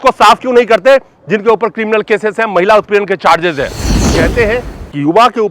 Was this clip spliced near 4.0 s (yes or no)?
yes